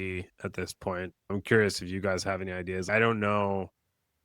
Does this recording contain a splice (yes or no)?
yes